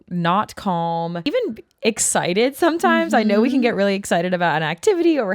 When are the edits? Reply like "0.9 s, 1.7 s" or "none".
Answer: 1.2 s